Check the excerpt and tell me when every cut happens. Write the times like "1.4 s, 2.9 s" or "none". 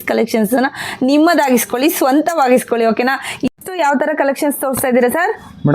3.5 s